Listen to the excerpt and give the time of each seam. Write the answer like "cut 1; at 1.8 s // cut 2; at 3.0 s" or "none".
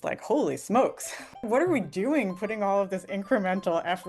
cut 1; at 1.4 s